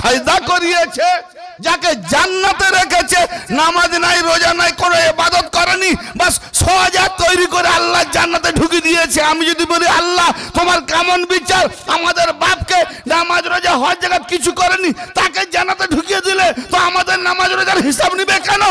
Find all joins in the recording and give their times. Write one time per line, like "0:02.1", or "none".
none